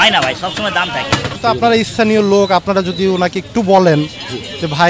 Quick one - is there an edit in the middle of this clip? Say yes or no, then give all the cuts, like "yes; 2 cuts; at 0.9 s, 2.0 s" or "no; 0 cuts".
yes; 1 cut; at 1.3 s